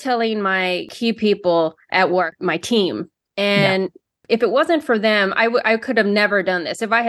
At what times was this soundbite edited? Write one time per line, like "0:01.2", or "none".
0:00.9
0:01.8